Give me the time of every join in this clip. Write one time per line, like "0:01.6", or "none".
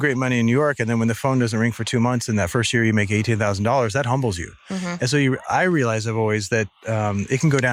none